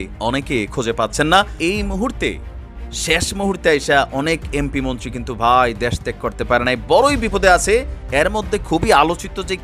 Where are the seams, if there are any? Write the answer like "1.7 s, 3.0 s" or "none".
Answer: 1.6 s